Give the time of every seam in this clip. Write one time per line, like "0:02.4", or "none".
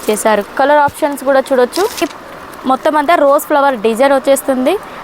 0:02.0